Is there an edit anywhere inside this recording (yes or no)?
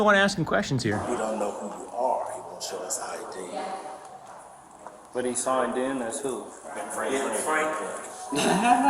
yes